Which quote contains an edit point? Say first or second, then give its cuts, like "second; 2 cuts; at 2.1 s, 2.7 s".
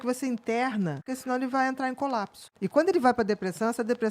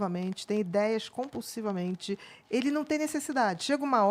first; 2 cuts; at 1.1 s, 2.4 s